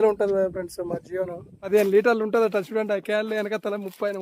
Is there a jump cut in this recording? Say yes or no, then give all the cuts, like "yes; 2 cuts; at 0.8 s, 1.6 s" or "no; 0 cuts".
yes; 1 cut; at 1.6 s